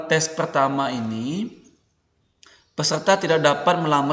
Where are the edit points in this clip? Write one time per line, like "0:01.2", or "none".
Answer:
none